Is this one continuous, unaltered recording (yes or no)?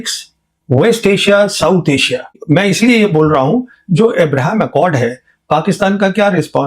no